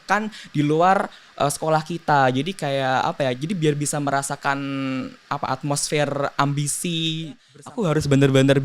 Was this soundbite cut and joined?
yes; 1 cut; at 7.5 s

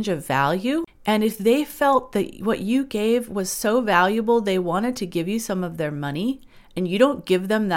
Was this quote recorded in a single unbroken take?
no; 1 cut; at 0.9 s

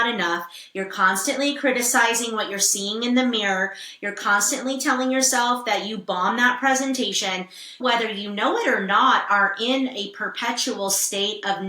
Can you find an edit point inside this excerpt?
no; 0 cuts

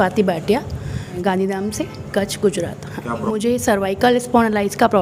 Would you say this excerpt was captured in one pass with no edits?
no; 2 cuts; at 1.2 s, 3.2 s

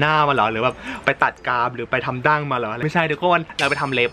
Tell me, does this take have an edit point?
no; 0 cuts

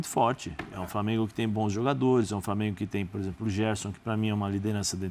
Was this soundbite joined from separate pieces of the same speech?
no; 0 cuts

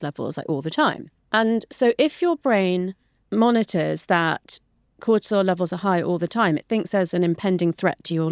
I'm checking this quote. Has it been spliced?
no; 0 cuts

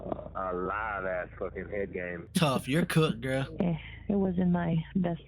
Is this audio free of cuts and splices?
no; 1 cut; at 2.3 s

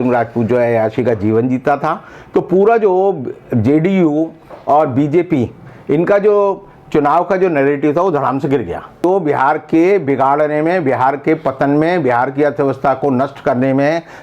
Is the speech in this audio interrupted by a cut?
yes; 1 cut; at 9.0 s

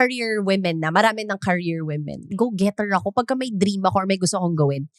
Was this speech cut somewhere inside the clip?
yes; 1 cut; at 2.3 s

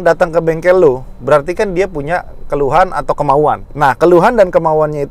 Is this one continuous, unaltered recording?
no; 1 cut; at 3.7 s

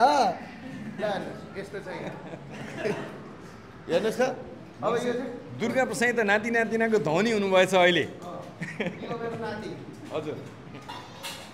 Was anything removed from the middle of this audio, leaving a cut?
no; 0 cuts

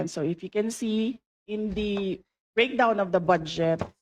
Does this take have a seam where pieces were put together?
yes; 1 cut; at 1.3 s

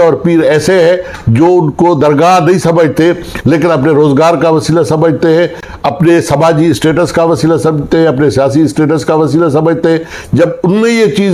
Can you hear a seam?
no; 0 cuts

